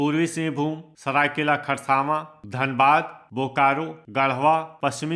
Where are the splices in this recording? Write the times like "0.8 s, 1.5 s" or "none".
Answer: none